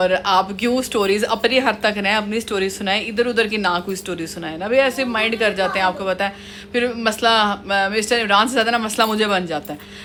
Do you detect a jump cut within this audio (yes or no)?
no